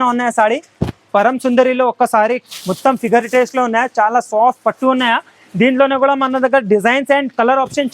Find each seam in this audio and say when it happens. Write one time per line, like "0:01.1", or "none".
0:01.0